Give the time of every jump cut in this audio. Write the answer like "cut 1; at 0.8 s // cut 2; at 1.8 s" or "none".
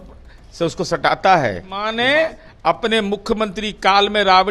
cut 1; at 1.9 s